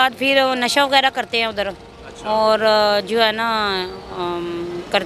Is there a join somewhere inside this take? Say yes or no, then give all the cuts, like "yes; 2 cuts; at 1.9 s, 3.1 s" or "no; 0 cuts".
no; 0 cuts